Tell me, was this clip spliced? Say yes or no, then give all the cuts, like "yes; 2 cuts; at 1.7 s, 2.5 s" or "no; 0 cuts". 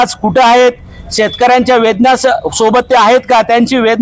no; 0 cuts